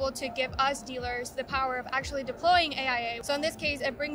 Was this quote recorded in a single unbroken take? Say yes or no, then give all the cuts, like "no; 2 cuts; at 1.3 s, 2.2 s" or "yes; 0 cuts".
no; 1 cut; at 3.2 s